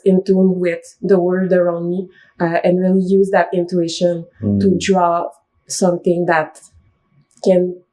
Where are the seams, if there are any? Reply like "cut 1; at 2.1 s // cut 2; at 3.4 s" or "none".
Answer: none